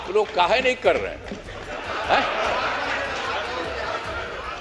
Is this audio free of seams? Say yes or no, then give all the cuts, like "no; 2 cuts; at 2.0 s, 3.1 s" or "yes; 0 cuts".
yes; 0 cuts